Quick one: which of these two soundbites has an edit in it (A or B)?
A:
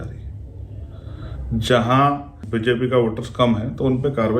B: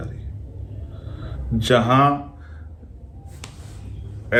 A